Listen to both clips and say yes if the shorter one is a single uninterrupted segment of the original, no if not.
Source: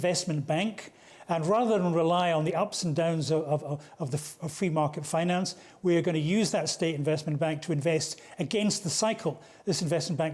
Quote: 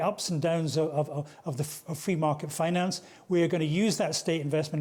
yes